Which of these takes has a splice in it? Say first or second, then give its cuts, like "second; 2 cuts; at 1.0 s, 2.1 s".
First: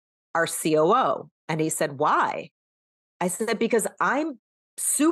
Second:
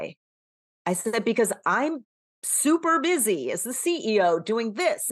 first; 1 cut; at 1.3 s